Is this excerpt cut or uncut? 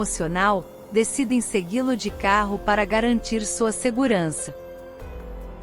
cut